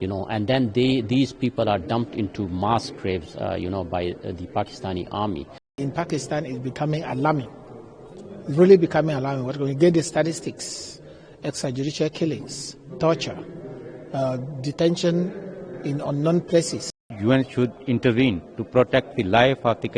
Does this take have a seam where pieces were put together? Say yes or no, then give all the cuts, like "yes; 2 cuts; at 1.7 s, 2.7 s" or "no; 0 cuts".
yes; 2 cuts; at 5.8 s, 17.0 s